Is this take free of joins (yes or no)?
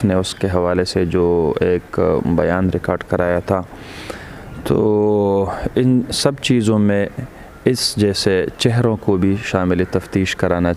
yes